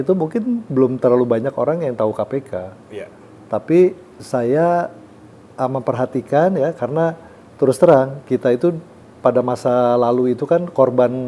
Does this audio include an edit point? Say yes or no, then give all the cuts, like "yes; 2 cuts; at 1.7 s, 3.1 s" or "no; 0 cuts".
no; 0 cuts